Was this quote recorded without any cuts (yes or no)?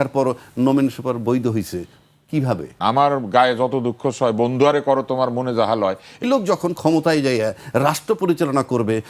no